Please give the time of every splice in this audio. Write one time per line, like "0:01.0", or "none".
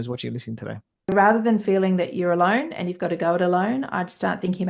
0:01.1